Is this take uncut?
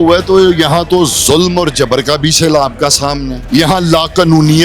no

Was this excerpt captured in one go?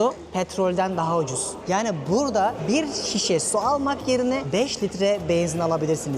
no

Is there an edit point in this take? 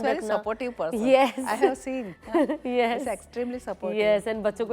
no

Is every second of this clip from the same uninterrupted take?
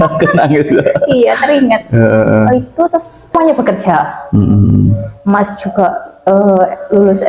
no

